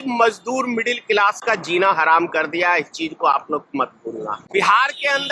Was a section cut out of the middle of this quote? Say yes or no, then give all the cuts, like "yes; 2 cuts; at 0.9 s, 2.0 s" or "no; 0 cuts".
yes; 1 cut; at 4.4 s